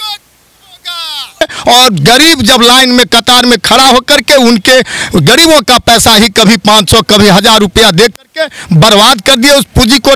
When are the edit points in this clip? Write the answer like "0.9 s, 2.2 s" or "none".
1.4 s